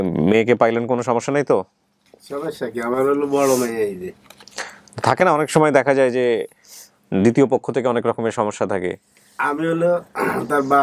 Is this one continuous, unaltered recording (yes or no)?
yes